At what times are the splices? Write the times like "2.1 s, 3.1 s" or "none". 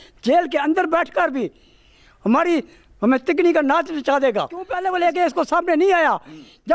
4.7 s